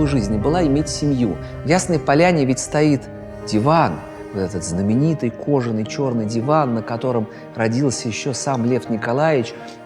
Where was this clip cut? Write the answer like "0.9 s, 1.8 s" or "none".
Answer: 1.5 s